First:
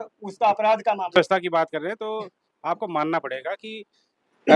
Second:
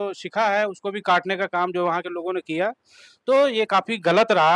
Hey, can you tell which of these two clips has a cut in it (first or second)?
first